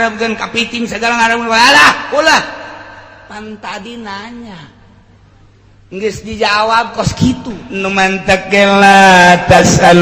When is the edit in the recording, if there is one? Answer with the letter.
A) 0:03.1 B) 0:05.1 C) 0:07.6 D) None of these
C